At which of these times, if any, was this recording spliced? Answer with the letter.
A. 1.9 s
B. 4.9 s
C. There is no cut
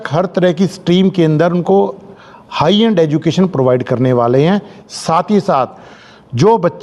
C